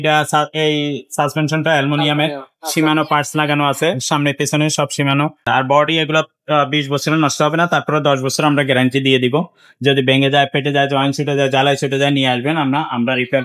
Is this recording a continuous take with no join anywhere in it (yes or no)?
no